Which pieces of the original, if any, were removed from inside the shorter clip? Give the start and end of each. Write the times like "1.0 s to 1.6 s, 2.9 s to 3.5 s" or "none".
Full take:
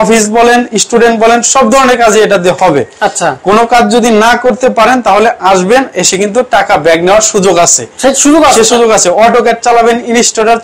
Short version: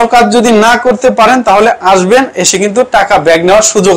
none